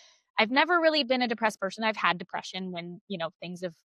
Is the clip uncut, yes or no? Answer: yes